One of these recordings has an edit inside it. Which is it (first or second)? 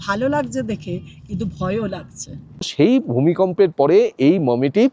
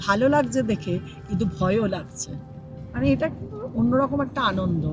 first